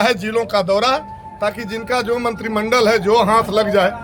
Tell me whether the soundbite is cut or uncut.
uncut